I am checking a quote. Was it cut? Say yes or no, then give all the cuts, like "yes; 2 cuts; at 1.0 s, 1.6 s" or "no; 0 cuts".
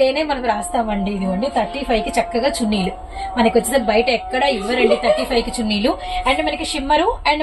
no; 0 cuts